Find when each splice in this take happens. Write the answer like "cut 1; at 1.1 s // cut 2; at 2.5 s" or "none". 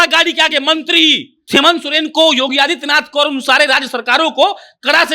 cut 1; at 1.3 s